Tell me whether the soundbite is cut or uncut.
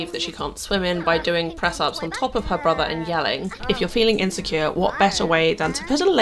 cut